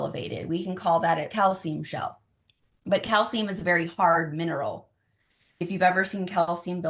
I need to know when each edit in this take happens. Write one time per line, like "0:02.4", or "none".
0:01.3